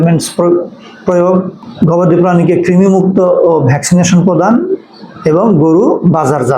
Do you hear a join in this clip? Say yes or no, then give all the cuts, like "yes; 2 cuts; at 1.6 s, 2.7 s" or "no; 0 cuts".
yes; 1 cut; at 1.6 s